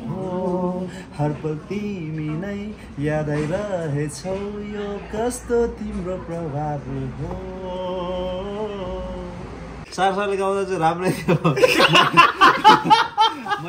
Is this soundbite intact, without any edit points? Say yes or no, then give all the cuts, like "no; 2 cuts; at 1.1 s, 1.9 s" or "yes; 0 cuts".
no; 1 cut; at 9.8 s